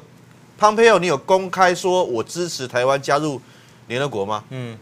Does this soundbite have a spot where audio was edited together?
no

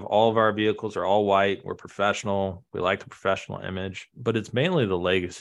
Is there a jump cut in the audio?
no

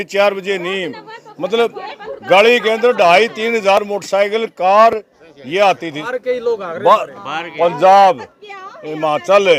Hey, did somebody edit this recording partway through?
no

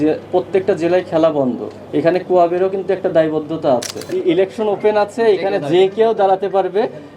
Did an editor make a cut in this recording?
yes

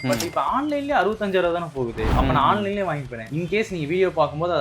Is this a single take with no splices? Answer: yes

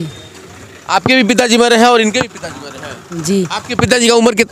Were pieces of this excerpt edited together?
no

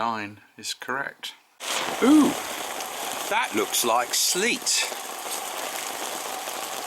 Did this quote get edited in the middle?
yes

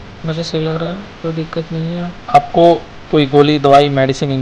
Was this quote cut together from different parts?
yes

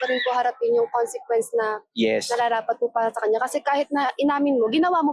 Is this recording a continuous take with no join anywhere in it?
yes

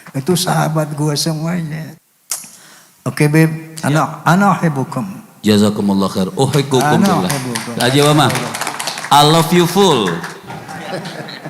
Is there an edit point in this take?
yes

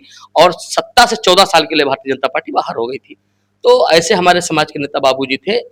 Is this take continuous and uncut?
yes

